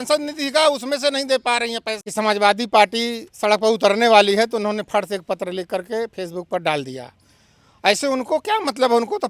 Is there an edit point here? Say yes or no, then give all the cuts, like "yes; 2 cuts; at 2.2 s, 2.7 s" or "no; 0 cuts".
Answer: yes; 1 cut; at 1.9 s